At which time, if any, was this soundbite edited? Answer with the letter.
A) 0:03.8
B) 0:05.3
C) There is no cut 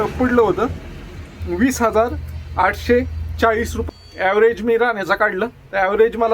A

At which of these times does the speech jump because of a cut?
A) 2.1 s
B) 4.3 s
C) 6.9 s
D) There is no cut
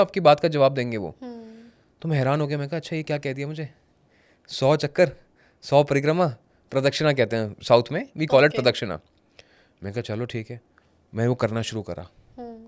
D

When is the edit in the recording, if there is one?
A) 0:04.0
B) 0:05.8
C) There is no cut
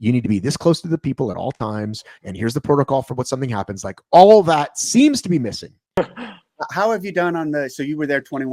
B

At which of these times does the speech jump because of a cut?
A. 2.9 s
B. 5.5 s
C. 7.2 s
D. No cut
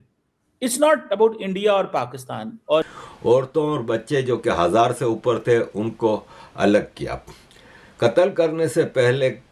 A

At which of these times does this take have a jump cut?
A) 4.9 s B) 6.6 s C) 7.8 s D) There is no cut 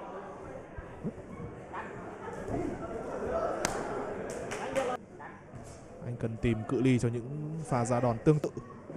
A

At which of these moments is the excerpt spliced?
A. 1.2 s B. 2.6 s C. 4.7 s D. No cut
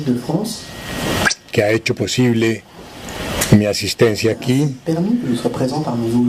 C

